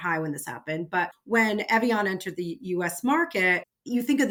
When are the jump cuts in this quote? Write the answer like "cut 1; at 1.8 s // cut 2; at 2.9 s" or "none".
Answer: none